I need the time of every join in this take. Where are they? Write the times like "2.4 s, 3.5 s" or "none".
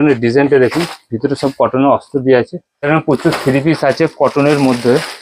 2.7 s